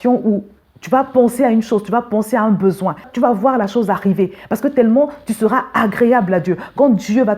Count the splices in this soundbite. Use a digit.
1